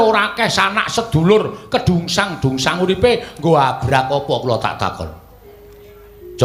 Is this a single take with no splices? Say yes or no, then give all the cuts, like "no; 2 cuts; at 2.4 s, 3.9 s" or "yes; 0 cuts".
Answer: yes; 0 cuts